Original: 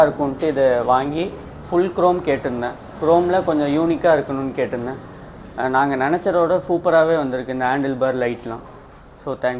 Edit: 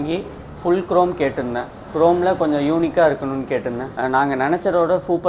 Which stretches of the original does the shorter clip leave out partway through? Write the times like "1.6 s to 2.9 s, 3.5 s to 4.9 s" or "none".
4.9 s to 5.5 s

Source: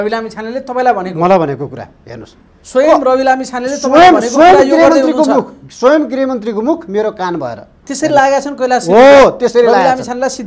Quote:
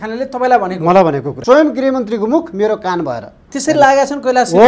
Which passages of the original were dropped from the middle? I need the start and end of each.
1.6 s to 5.6 s

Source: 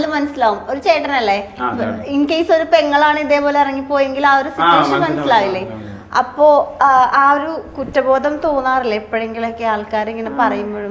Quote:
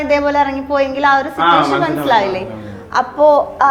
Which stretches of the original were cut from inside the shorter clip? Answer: none

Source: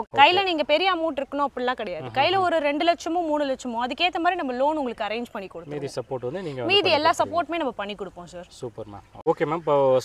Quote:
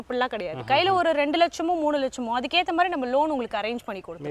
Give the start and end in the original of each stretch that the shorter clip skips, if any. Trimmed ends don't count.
none

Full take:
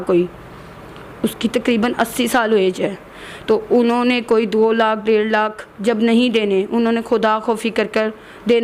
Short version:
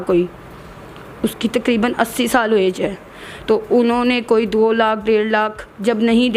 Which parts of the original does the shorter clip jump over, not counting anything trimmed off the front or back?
none

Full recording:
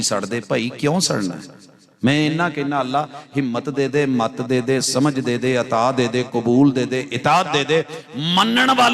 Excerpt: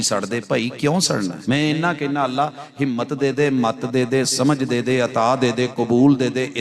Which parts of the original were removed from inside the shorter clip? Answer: 1.4 s to 1.9 s

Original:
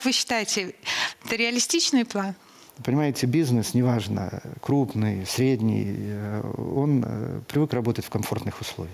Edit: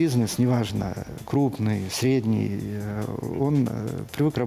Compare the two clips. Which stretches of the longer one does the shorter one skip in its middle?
none

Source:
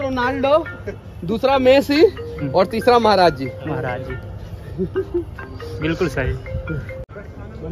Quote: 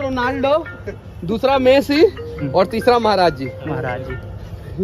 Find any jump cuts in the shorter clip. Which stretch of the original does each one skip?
none

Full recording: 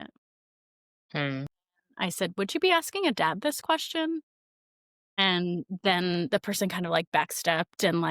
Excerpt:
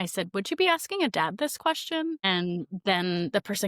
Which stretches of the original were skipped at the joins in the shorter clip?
4.2 s to 5.2 s

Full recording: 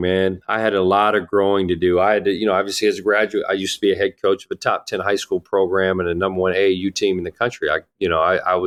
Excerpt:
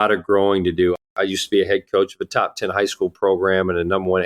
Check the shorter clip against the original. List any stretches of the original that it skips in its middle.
2.0 s to 3.3 s

